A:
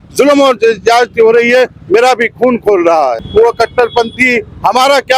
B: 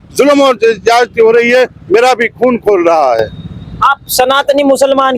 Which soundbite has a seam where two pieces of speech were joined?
A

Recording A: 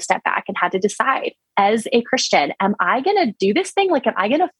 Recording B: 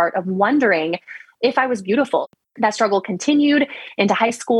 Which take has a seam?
B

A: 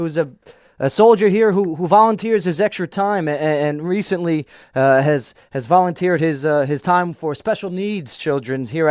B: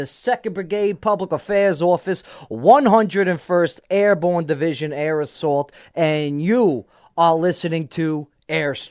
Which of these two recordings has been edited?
A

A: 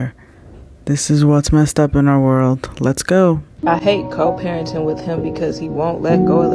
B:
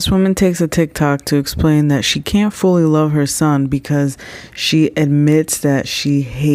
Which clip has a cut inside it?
A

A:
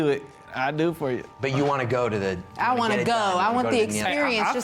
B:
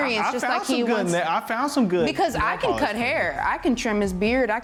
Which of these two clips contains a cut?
A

